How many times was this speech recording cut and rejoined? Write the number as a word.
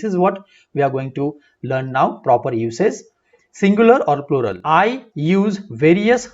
one